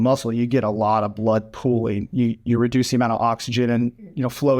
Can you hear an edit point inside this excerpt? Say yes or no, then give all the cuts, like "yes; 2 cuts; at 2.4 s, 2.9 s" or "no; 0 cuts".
no; 0 cuts